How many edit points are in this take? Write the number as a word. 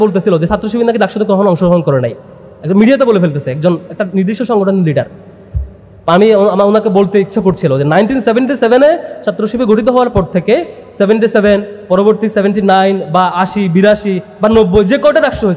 zero